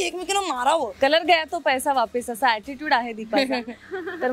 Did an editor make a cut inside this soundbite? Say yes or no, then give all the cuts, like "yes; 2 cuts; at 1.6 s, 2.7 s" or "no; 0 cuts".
yes; 1 cut; at 0.9 s